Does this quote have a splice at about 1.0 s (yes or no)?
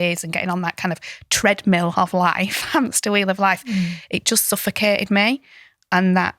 no